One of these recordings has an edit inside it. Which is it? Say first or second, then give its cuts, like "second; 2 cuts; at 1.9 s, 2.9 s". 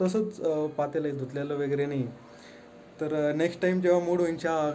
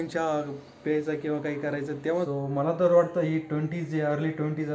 second; 1 cut; at 2.3 s